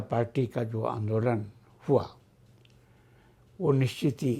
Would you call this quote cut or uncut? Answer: uncut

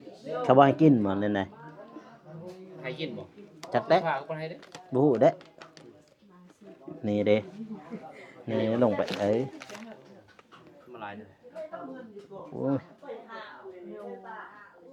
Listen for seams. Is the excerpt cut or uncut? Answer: uncut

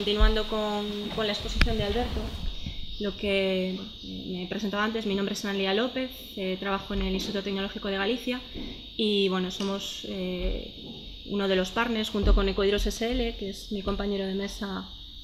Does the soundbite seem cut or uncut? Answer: uncut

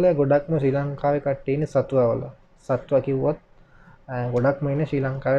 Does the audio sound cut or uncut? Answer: uncut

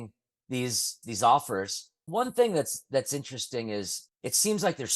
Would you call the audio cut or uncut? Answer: cut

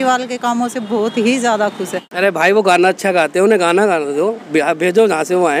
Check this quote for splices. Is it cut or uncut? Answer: cut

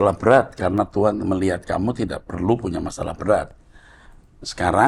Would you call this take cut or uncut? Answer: uncut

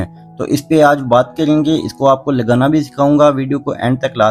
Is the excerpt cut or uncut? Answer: uncut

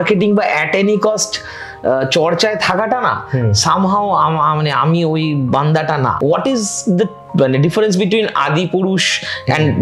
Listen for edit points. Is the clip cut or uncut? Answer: cut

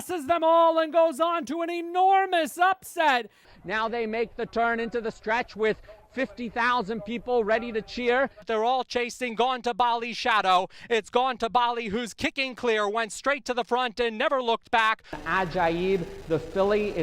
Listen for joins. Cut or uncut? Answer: cut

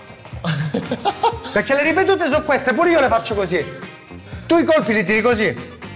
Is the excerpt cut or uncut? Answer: uncut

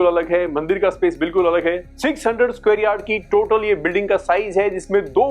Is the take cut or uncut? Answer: cut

